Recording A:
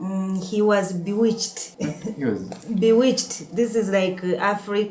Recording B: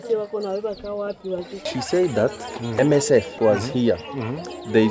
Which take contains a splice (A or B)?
B